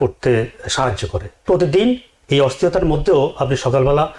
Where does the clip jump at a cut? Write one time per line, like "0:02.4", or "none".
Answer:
0:01.3